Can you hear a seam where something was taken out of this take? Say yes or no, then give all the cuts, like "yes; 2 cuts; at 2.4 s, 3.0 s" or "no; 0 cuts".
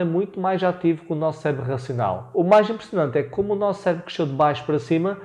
yes; 1 cut; at 2.2 s